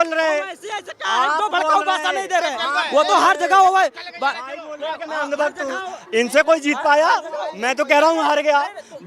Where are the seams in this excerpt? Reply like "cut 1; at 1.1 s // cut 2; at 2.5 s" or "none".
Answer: none